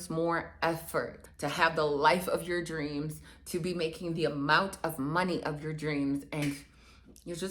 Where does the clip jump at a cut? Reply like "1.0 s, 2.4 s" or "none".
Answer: 1.2 s, 6.4 s

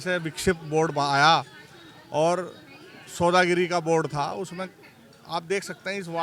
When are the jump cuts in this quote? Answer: none

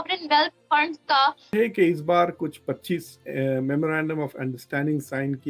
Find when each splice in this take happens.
1.5 s

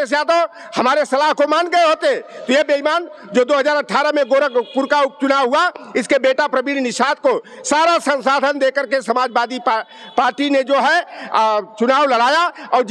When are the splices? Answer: none

